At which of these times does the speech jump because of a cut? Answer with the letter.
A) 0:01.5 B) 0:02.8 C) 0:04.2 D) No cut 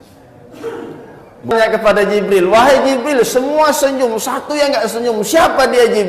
A